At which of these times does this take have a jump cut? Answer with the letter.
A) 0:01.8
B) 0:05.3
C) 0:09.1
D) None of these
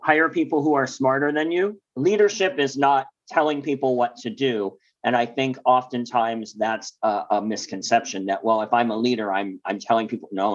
A